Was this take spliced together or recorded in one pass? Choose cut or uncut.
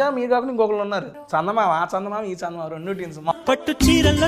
cut